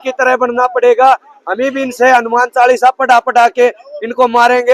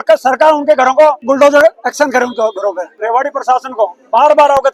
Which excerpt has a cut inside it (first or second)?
second